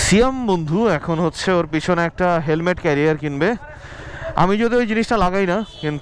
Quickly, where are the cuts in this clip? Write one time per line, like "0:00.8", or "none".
none